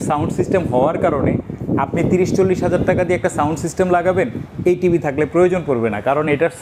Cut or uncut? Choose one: uncut